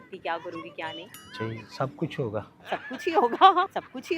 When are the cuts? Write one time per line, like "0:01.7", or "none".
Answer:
0:01.2
0:02.6